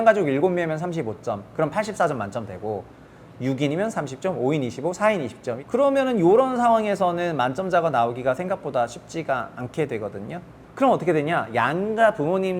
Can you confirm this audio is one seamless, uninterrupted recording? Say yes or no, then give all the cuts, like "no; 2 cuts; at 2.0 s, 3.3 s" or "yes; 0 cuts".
no; 2 cuts; at 5.5 s, 10.6 s